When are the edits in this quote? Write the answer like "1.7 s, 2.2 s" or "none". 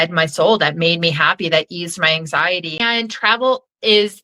2.8 s